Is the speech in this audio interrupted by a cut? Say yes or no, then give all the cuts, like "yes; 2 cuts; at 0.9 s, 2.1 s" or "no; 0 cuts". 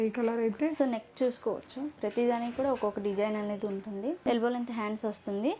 yes; 1 cut; at 4.2 s